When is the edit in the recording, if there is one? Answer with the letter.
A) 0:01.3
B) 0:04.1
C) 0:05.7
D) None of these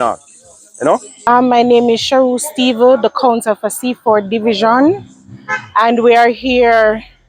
A